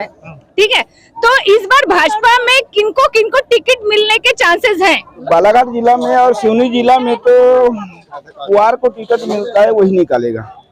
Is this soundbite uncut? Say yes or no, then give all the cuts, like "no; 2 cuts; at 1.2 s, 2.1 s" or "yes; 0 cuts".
no; 1 cut; at 5.2 s